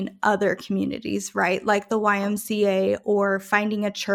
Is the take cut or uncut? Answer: uncut